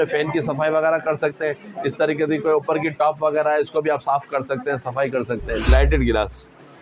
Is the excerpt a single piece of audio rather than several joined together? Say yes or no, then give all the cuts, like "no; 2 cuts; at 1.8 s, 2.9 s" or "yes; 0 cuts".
no; 1 cut; at 5.7 s